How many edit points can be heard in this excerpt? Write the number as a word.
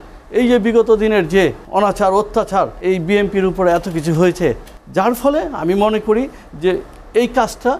three